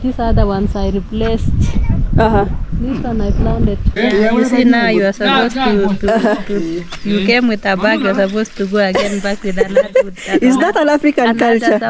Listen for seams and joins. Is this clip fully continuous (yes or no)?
no